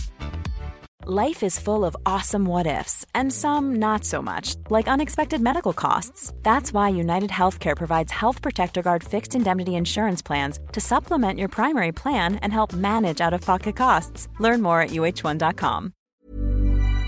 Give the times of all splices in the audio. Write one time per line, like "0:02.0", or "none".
0:16.0

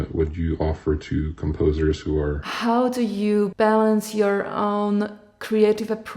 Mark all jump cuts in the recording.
0:02.5
0:03.5

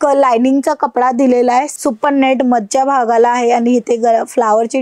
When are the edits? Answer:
0:01.7

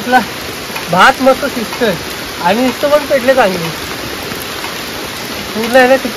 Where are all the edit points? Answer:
none

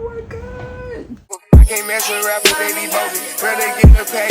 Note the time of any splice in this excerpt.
0:01.1

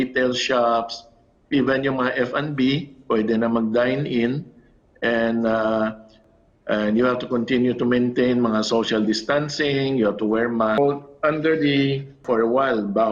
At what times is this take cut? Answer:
0:06.2
0:10.8
0:12.2

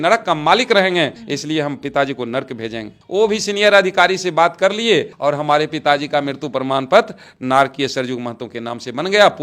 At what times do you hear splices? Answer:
none

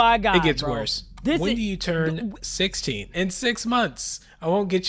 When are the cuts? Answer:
0:03.1

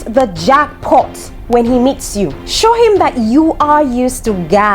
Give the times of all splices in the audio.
0:02.4

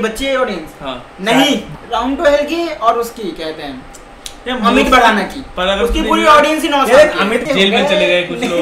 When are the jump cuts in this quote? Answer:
0:01.7
0:07.4

